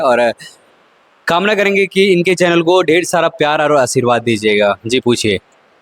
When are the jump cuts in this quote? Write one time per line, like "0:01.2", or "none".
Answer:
none